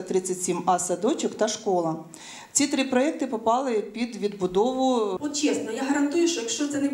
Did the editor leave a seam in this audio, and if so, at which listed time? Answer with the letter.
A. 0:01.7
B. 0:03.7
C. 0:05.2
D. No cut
C